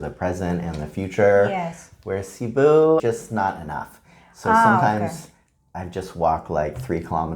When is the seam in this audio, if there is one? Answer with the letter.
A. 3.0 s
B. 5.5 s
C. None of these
A